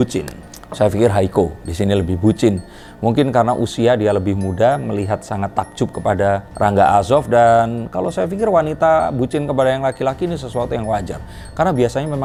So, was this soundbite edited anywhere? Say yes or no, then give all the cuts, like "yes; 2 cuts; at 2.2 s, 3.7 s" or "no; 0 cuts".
no; 0 cuts